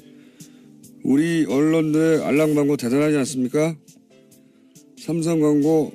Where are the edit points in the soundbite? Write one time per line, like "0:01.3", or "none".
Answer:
0:03.7